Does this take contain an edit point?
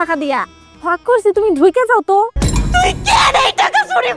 yes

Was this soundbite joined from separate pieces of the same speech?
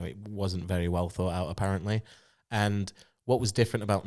no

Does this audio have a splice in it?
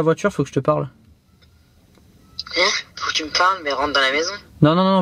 no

